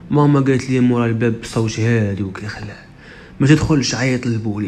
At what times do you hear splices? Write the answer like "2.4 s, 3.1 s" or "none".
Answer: none